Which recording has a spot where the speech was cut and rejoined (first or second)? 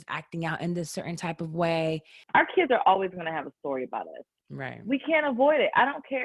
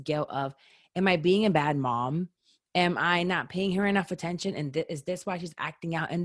first